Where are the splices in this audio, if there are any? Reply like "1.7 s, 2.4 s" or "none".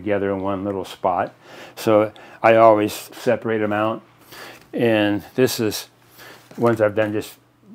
3.1 s